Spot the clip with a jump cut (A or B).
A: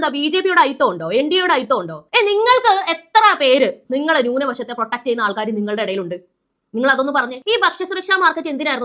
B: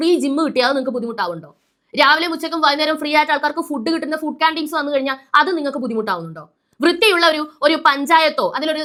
A